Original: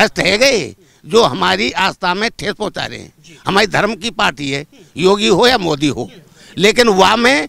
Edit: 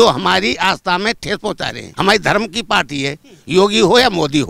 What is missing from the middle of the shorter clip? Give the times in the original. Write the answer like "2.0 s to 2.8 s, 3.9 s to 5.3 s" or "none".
2.9 s to 3.2 s

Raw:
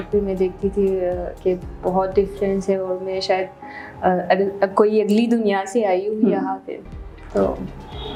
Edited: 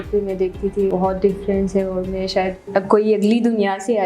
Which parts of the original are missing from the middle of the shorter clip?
0.9 s to 1.8 s, 3.6 s to 4.5 s

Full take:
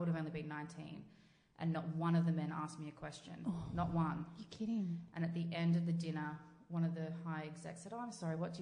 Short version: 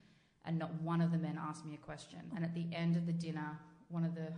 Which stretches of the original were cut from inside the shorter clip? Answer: 3.4 s to 5.1 s

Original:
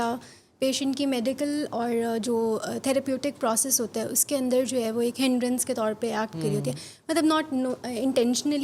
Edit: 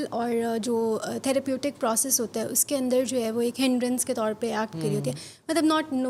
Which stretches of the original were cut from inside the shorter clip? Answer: none

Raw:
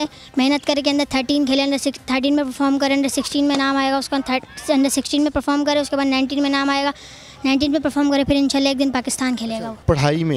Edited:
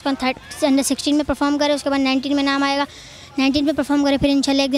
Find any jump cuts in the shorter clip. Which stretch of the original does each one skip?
none

